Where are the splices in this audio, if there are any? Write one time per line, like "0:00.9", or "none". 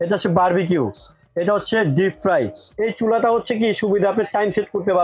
0:02.6